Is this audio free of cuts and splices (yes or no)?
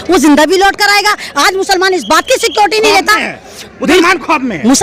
yes